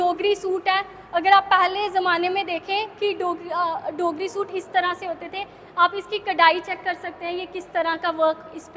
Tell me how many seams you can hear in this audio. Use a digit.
0